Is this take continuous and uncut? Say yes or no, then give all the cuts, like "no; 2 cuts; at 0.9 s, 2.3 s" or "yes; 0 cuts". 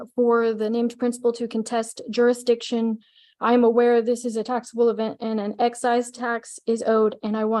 yes; 0 cuts